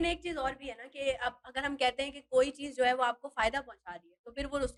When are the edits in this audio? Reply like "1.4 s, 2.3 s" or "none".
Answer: none